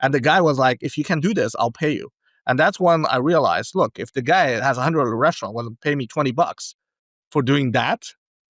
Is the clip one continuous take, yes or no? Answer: yes